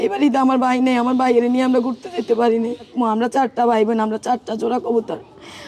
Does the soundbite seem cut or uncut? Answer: cut